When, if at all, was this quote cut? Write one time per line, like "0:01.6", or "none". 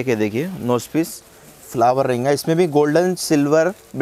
none